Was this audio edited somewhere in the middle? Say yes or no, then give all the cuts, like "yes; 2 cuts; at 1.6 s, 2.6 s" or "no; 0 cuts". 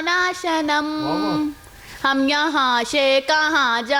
no; 0 cuts